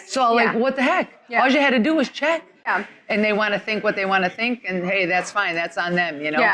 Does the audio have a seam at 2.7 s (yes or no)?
yes